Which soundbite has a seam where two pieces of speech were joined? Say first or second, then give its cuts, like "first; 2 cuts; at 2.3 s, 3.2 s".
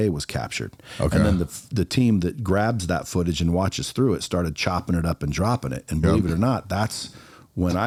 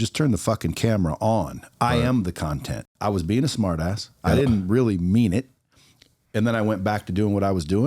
second; 1 cut; at 2.8 s